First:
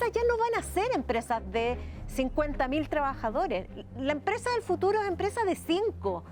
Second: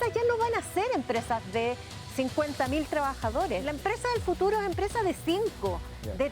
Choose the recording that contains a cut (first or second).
second